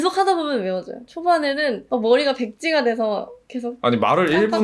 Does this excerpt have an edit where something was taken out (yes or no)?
yes